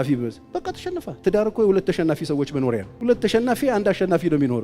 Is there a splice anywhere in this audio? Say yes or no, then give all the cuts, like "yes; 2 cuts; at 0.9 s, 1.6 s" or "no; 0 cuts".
yes; 1 cut; at 2.9 s